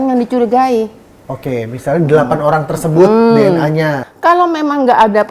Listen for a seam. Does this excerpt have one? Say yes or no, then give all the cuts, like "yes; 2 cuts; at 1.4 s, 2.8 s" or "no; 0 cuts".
yes; 1 cut; at 4.1 s